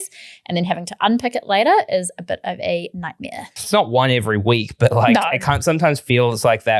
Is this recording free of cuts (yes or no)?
no